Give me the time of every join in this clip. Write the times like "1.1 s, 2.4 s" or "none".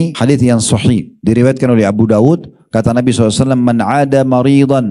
none